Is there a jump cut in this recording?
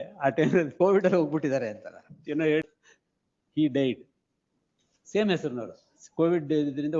yes; 1 cut; at 2.6 s

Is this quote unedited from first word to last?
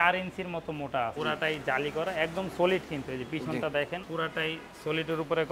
no; 2 cuts; at 1.1 s, 4.0 s

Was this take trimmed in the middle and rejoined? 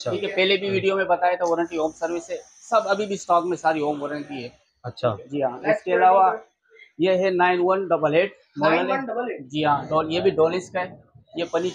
no; 0 cuts

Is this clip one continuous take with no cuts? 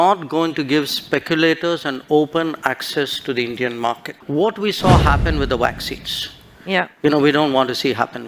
no; 1 cut; at 4.1 s

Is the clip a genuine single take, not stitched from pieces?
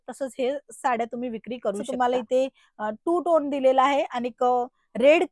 no; 1 cut; at 1.9 s

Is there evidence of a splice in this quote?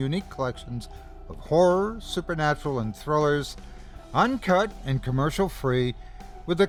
no; 0 cuts

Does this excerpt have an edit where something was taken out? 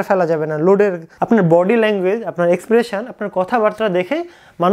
yes; 1 cut; at 1.1 s

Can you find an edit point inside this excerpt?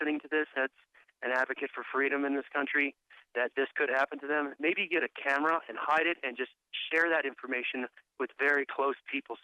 yes; 1 cut; at 5.8 s

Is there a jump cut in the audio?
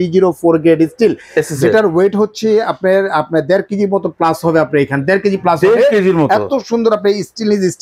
no; 0 cuts

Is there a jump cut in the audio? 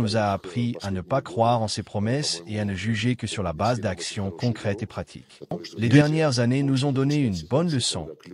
yes; 1 cut; at 5.7 s

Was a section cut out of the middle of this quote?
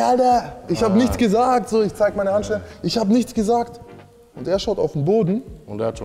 no; 0 cuts

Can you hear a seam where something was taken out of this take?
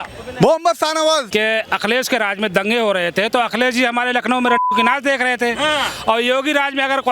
yes; 1 cut; at 1.3 s

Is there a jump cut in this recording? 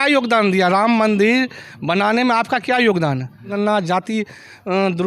yes; 1 cut; at 3.5 s

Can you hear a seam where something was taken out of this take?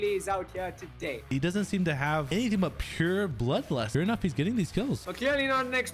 yes; 4 cuts; at 1.3 s, 2.3 s, 3.9 s, 5.1 s

